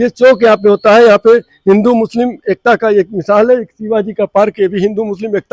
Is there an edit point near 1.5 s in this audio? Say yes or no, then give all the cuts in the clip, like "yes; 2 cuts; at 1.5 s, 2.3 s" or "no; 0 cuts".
no; 0 cuts